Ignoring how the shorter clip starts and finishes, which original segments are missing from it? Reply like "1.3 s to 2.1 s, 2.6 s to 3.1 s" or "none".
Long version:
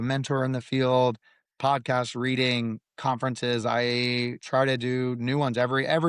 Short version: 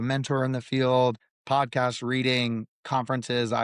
1.3 s to 1.4 s

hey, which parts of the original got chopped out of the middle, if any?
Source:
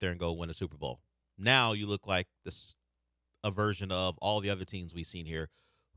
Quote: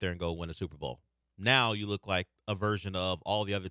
2.3 s to 3.3 s

